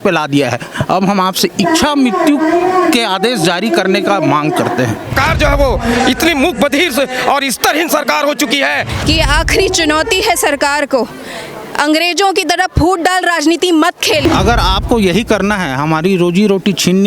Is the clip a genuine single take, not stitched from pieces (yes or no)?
no